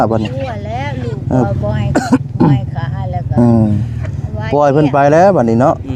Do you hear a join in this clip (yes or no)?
no